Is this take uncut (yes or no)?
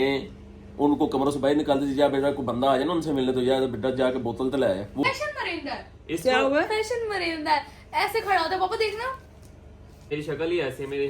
no